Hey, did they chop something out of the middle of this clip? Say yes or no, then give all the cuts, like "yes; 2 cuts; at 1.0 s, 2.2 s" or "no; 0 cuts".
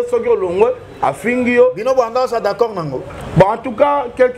no; 0 cuts